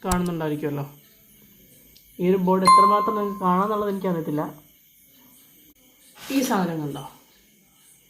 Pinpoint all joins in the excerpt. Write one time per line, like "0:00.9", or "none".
0:05.8